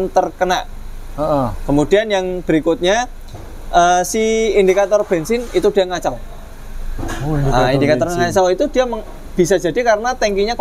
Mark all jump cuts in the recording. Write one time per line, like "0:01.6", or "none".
none

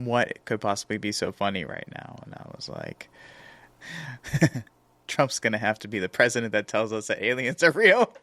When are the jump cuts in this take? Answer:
0:03.7

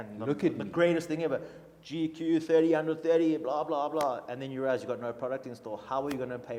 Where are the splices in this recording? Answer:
none

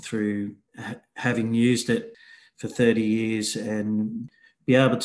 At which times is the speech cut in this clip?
0:02.1
0:04.2

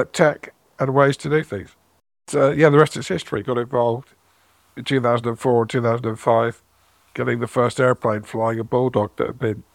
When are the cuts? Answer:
0:02.2

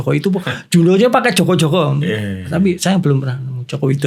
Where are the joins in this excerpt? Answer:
none

